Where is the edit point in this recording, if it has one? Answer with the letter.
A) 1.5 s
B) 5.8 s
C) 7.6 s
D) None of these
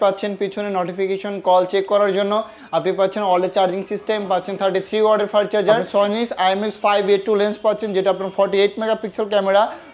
B